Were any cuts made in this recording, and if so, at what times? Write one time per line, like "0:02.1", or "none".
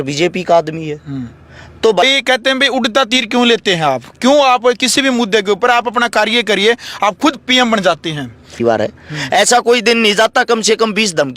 0:02.0
0:08.6